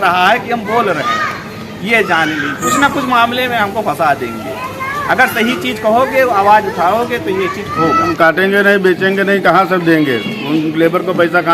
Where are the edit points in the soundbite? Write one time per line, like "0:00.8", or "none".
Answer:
0:02.6
0:08.1